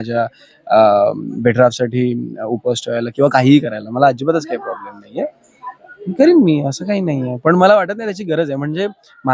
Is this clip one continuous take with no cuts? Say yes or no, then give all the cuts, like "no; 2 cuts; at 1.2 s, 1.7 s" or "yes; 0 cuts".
yes; 0 cuts